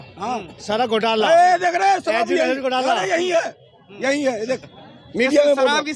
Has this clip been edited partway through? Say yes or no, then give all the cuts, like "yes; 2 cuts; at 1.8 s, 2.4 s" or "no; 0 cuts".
no; 0 cuts